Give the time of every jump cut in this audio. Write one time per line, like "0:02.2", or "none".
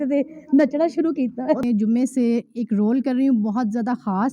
0:01.6